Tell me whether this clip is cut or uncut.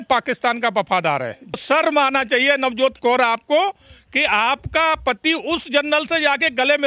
cut